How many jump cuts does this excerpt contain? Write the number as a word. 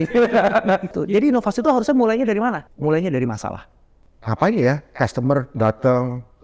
three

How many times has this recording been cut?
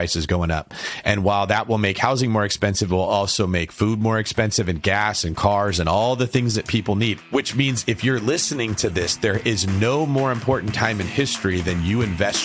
zero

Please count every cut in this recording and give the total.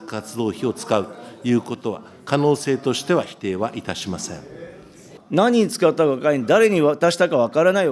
one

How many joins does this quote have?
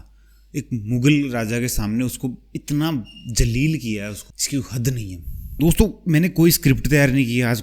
one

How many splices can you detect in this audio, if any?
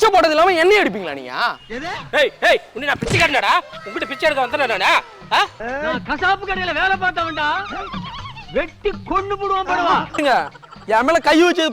three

